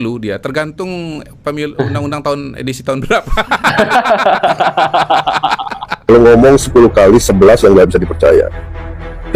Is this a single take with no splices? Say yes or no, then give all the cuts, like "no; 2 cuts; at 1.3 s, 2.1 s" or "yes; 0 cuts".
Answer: no; 1 cut; at 6.0 s